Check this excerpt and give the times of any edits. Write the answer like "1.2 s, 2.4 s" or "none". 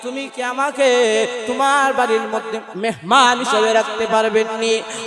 2.6 s